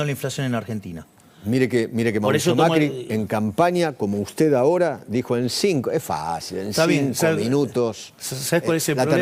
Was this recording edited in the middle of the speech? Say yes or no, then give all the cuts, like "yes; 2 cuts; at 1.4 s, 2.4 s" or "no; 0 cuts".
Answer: no; 0 cuts